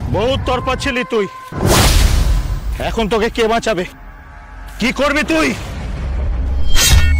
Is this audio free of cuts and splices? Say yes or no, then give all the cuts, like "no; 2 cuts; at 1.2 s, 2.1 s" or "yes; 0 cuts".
yes; 0 cuts